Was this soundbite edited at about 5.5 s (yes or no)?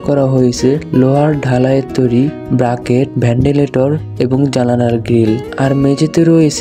no